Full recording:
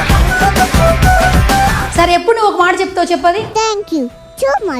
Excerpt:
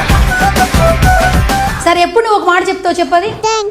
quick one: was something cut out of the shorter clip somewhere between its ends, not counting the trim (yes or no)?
yes